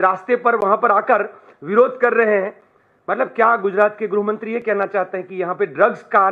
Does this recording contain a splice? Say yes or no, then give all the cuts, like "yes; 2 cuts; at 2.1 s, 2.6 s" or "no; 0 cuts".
no; 0 cuts